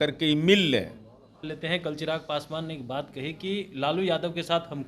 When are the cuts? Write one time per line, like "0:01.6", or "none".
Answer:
0:01.5